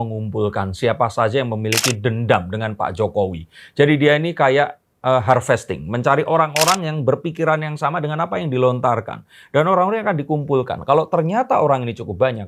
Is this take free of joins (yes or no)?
yes